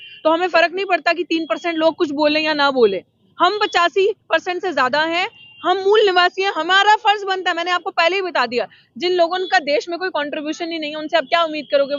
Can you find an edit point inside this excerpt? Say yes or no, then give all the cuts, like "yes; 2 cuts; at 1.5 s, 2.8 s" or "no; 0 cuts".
no; 0 cuts